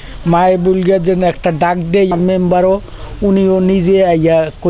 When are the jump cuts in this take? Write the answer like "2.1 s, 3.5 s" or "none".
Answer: 2.1 s